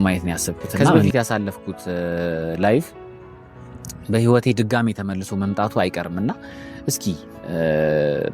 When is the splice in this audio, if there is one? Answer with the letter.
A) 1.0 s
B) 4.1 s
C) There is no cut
A